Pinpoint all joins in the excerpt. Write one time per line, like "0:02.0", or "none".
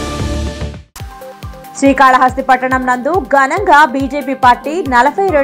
0:01.5

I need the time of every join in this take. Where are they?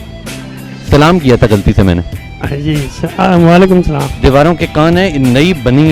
0:04.0

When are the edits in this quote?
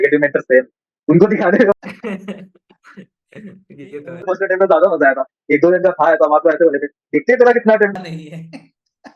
none

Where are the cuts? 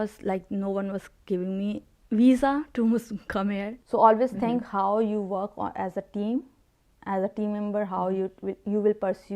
0:03.7

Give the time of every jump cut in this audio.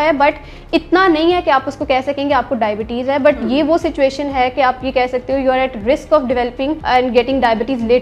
0:06.8

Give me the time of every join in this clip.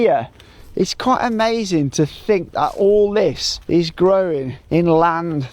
0:03.5
0:04.5

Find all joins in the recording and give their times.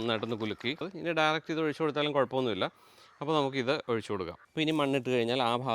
0:00.9
0:04.4

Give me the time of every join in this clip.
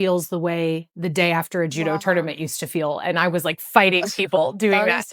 none

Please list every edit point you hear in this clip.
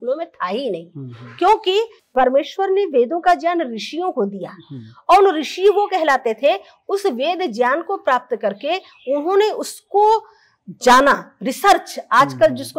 0:02.0

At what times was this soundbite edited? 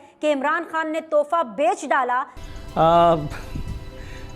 0:02.3

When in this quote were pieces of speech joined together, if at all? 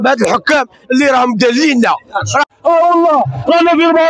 0:02.4

